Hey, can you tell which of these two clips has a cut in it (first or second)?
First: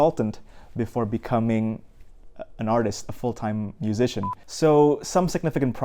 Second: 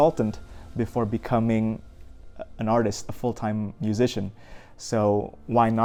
first